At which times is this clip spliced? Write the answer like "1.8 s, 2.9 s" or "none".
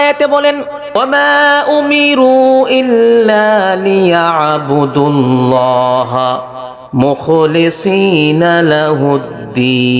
1.0 s